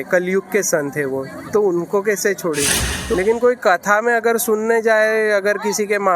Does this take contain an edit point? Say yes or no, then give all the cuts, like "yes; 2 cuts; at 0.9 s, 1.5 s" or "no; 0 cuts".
yes; 1 cut; at 3.1 s